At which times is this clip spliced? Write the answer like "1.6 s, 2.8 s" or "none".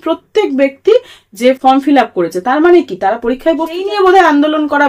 3.8 s